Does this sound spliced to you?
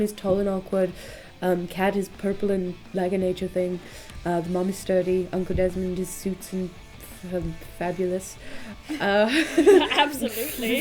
no; 0 cuts

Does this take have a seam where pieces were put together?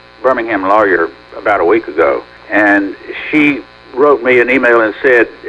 yes; 3 cuts; at 1.2 s, 2.3 s, 3.8 s

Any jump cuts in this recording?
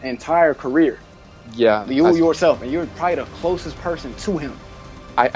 no; 0 cuts

